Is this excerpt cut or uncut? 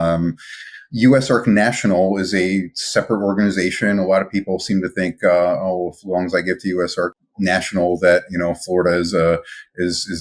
cut